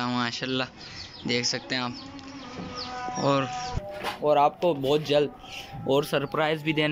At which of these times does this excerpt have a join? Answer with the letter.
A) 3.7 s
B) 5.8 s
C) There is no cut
A